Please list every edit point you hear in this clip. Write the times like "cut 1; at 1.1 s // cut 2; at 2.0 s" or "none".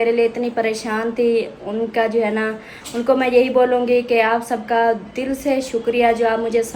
none

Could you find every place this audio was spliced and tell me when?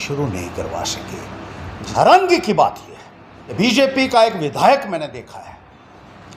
cut 1; at 1.7 s // cut 2; at 3.6 s

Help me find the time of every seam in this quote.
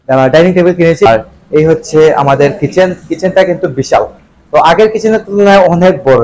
cut 1; at 1.1 s

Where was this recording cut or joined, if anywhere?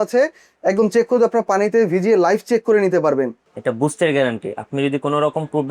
cut 1; at 3.4 s

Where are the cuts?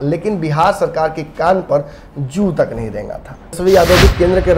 cut 1; at 3.5 s

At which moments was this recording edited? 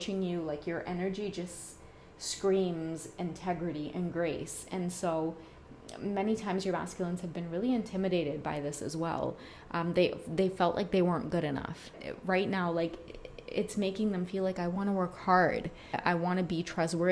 cut 1; at 12.0 s // cut 2; at 16.0 s

